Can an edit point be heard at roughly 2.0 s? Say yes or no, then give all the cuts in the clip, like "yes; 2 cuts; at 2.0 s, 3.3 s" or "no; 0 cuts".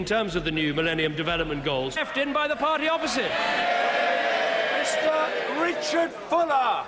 no; 0 cuts